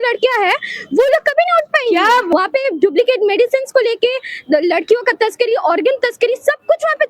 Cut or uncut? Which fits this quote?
cut